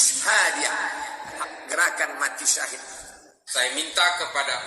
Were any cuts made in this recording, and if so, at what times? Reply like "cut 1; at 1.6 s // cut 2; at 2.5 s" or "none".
cut 1; at 1.3 s // cut 2; at 3.3 s